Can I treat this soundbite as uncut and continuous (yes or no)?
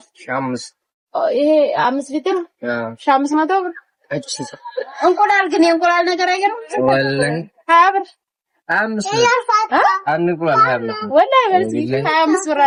yes